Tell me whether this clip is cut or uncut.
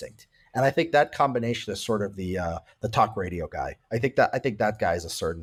uncut